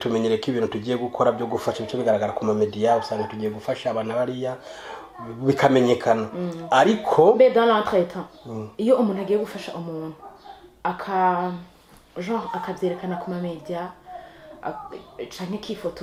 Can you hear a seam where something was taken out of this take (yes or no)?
no